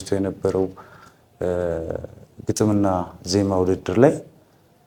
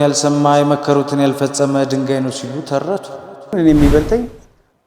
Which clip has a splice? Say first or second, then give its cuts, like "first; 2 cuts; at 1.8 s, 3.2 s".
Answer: second; 1 cut; at 3.5 s